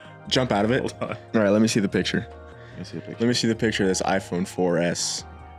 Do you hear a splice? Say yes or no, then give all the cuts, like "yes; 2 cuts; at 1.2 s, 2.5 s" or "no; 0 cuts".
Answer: no; 0 cuts